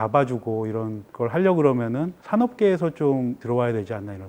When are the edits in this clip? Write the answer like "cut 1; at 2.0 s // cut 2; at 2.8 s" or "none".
cut 1; at 1.0 s // cut 2; at 2.1 s // cut 3; at 3.4 s